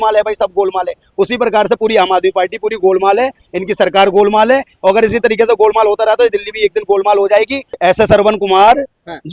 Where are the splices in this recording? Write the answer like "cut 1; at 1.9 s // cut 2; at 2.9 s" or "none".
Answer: cut 1; at 7.7 s